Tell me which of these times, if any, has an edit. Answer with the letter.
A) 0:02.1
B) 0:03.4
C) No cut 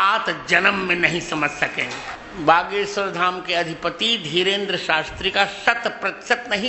A